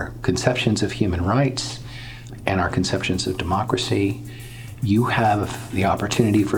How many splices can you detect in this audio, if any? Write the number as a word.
one